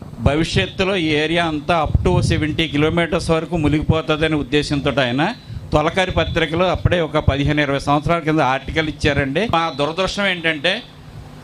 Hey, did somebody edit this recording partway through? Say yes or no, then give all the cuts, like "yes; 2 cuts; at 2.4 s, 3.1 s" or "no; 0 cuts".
yes; 1 cut; at 9.5 s